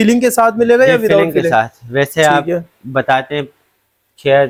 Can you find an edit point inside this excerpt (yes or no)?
no